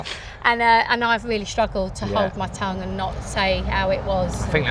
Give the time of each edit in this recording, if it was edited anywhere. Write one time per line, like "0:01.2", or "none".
none

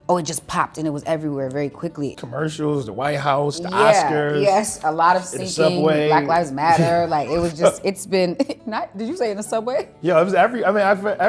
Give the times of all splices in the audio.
0:02.1

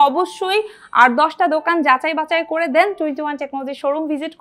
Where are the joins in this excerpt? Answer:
none

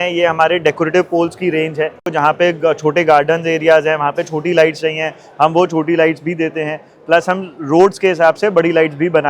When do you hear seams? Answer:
0:02.0

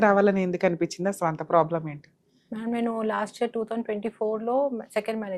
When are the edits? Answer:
none

